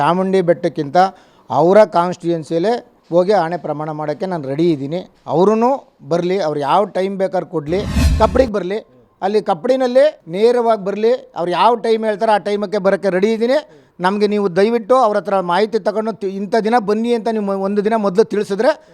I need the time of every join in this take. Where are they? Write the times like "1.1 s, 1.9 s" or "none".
2.9 s, 5.1 s, 8.0 s